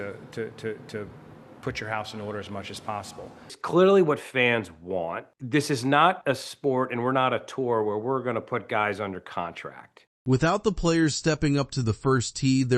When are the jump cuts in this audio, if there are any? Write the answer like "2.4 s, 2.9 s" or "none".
none